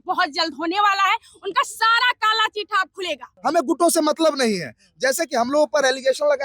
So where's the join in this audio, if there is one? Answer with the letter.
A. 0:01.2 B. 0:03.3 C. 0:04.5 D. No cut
B